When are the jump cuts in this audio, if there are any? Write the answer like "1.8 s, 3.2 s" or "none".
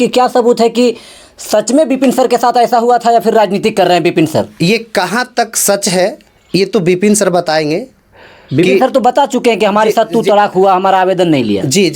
none